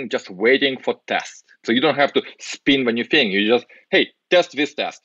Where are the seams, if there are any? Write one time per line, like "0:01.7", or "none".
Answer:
0:01.6